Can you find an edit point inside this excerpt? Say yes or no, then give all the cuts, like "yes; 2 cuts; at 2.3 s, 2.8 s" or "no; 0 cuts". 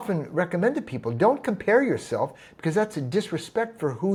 no; 0 cuts